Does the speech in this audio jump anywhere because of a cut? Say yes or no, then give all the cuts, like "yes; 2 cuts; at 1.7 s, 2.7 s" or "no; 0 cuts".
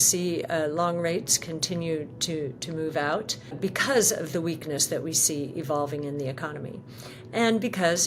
yes; 1 cut; at 3.6 s